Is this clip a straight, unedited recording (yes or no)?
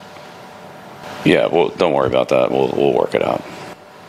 yes